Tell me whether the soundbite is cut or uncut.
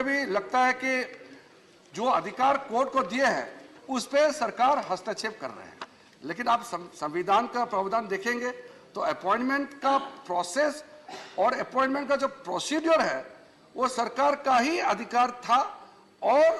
uncut